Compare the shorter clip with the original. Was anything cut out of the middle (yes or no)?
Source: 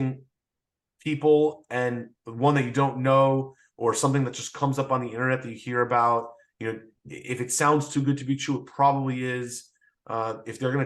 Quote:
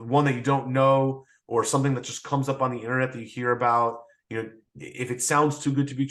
no